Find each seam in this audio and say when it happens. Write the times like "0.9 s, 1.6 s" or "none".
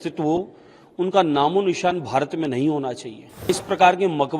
3.5 s